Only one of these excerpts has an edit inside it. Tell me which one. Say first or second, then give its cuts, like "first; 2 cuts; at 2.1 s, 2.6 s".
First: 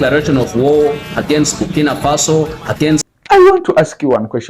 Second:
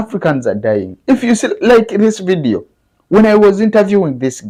first; 1 cut; at 3.1 s